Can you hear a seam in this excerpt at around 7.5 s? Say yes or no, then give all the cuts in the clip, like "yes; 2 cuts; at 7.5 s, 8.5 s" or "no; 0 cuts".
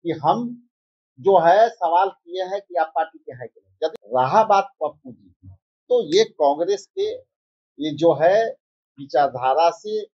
no; 1 cut; at 4.0 s